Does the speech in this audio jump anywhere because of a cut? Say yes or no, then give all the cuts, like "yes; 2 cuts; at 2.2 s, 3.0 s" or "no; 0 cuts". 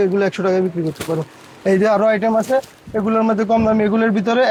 no; 0 cuts